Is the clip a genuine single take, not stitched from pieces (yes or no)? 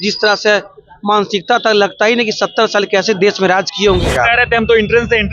no